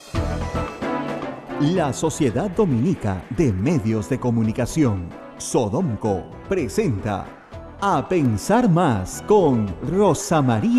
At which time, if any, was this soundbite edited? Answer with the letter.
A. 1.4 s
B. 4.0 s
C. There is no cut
A